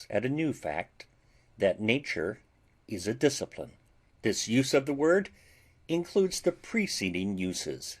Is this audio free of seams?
no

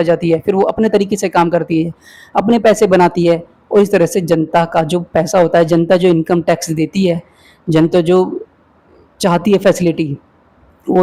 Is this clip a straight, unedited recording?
yes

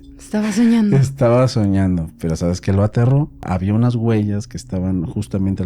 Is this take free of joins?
no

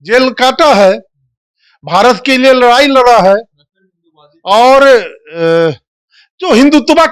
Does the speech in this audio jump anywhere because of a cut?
no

